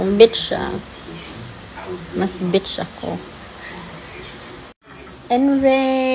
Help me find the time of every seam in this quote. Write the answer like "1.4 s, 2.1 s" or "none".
4.9 s